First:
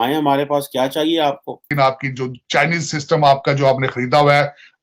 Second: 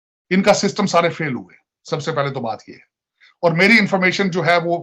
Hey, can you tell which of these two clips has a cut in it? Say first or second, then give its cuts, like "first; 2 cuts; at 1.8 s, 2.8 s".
first; 1 cut; at 1.7 s